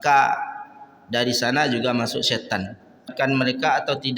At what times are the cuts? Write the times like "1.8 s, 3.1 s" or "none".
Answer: 3.1 s